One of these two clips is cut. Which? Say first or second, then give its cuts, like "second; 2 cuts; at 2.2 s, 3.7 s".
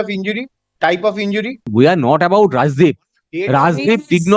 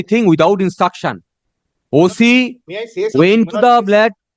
first; 1 cut; at 1.6 s